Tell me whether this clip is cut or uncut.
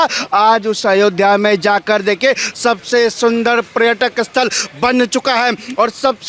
uncut